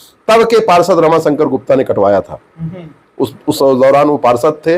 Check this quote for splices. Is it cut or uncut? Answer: uncut